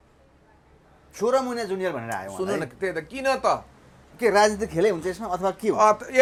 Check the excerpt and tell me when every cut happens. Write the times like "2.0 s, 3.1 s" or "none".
none